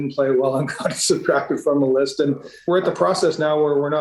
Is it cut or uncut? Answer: cut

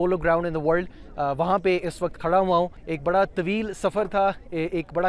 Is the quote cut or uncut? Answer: cut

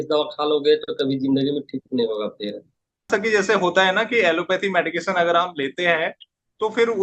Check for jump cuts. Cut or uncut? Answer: cut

